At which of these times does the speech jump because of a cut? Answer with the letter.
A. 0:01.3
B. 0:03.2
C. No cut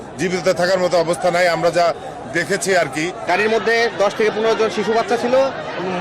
B